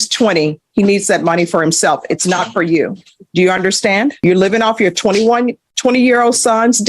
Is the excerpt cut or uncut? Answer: cut